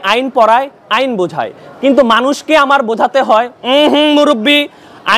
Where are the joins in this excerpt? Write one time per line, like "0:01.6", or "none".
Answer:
none